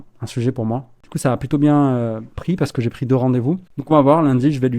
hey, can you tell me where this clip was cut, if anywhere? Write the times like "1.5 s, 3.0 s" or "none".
1.0 s, 3.7 s